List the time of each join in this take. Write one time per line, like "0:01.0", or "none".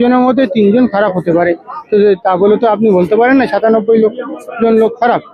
none